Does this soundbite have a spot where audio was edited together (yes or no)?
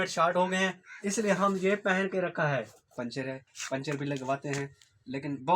yes